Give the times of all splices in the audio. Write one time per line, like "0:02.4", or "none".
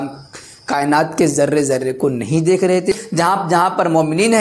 0:03.0